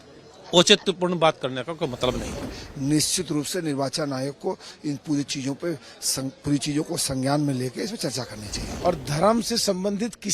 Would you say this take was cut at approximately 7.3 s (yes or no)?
no